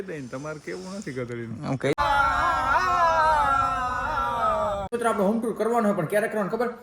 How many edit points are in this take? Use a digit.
2